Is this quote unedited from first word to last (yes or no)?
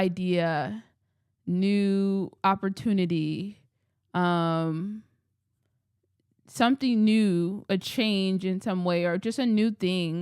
yes